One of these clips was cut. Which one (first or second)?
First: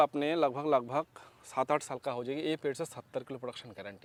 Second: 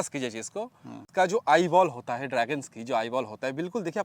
second